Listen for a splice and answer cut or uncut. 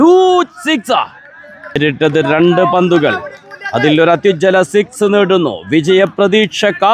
cut